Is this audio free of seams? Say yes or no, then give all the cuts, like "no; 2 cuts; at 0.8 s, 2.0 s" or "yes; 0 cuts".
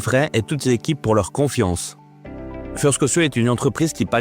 yes; 0 cuts